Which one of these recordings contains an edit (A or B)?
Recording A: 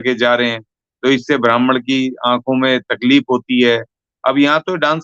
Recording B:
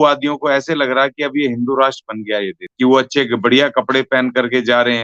B